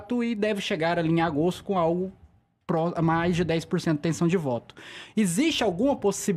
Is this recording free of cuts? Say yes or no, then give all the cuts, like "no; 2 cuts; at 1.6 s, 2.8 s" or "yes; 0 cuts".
yes; 0 cuts